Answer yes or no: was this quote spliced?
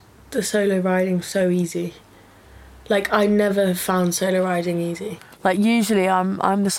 yes